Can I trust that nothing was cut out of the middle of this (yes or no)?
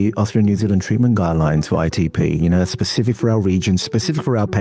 yes